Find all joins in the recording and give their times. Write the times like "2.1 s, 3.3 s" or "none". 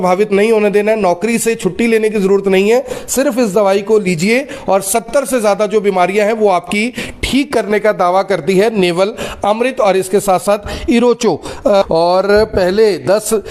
11.8 s